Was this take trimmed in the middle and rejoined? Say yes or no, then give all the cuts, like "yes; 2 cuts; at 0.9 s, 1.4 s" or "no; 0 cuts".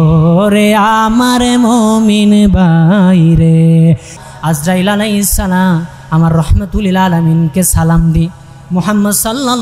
yes; 1 cut; at 4.2 s